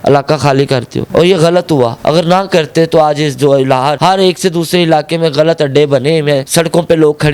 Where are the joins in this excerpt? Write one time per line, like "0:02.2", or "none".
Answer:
none